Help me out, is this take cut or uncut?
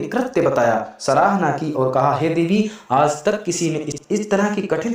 cut